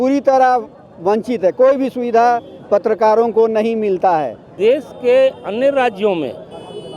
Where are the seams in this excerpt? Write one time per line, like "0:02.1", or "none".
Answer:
0:04.5